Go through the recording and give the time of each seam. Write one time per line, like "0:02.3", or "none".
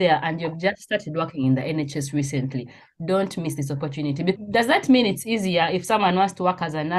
0:04.4